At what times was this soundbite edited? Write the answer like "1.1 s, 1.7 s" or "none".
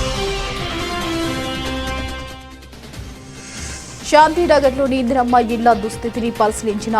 3.0 s

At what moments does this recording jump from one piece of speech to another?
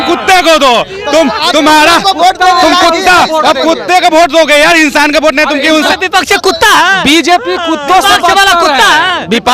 5.9 s

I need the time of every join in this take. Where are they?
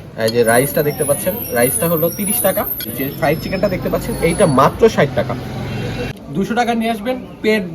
3.2 s, 6.0 s

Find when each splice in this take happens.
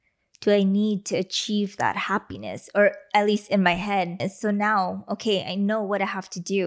4.2 s

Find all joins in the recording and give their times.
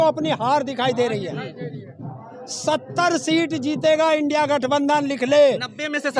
none

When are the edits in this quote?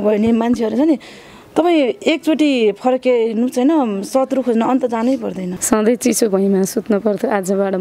5.5 s

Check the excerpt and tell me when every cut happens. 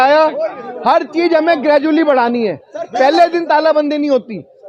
none

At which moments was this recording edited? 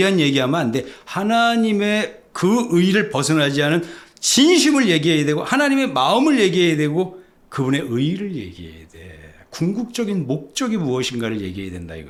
none

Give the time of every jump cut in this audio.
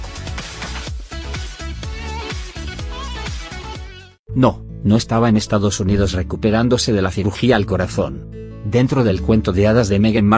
none

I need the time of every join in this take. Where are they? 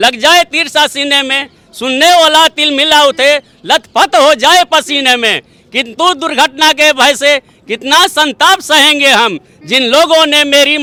none

